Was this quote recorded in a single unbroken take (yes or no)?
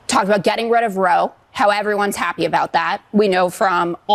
yes